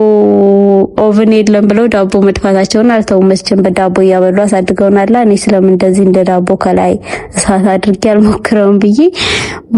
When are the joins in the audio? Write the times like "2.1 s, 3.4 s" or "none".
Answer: none